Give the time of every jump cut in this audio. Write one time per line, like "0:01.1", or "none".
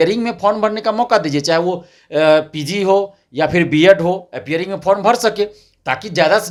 none